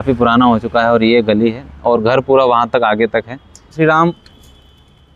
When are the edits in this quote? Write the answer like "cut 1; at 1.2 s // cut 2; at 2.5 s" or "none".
cut 1; at 3.8 s